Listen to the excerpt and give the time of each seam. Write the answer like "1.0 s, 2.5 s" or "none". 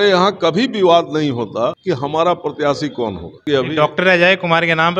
1.8 s, 3.4 s